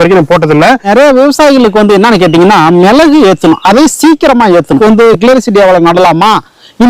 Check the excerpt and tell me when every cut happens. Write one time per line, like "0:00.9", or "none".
0:00.9
0:04.8